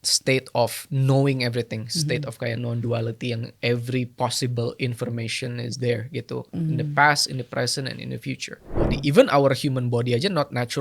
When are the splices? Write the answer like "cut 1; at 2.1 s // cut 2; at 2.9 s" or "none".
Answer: cut 1; at 8.8 s